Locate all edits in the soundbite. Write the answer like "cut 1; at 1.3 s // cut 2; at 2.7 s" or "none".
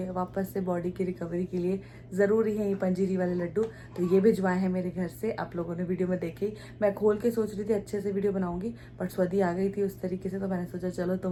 none